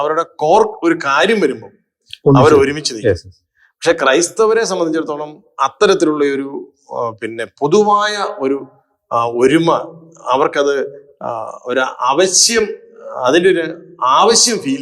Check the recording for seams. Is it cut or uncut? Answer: uncut